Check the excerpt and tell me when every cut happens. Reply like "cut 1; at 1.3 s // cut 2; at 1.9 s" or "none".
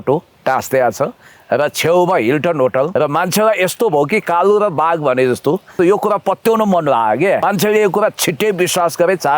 cut 1; at 2.9 s // cut 2; at 5.7 s // cut 3; at 7.4 s

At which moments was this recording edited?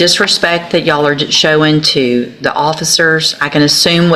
none

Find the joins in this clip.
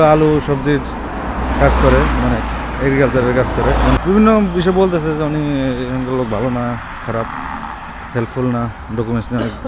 cut 1; at 4.0 s

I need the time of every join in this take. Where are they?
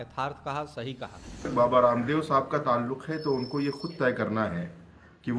cut 1; at 1.5 s

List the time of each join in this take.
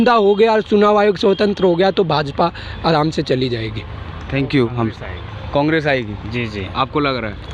none

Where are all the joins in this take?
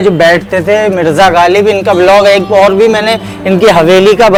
none

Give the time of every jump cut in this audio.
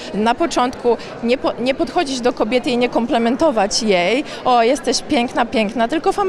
none

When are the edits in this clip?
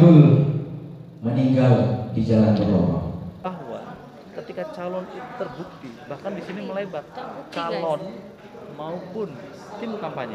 cut 1; at 3.5 s

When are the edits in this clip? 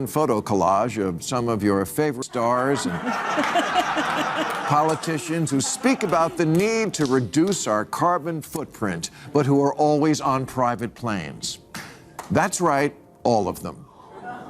cut 1; at 2.2 s

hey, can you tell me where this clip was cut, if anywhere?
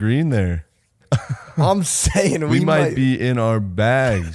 cut 1; at 1.0 s

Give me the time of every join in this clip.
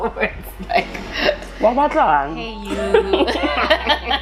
none

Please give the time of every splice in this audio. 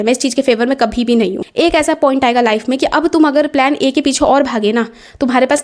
cut 1; at 1.4 s

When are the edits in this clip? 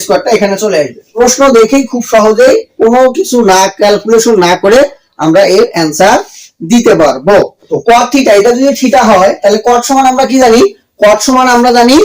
cut 1; at 1.0 s // cut 2; at 7.6 s

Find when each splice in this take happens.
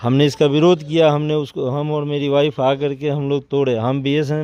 none

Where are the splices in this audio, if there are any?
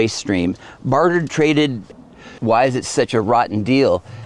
cut 1; at 2.3 s

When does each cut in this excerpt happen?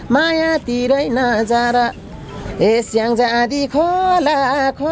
none

